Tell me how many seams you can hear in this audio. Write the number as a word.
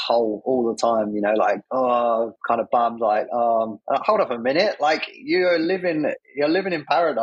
four